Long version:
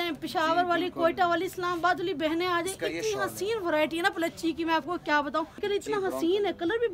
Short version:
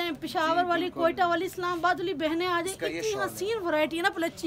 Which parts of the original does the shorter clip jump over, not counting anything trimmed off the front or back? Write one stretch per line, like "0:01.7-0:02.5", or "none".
none